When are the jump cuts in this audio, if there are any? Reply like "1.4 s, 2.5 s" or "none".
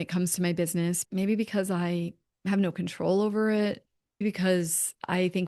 4.2 s